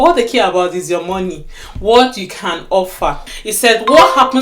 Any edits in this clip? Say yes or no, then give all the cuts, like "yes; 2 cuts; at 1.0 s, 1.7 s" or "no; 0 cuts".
yes; 1 cut; at 3.2 s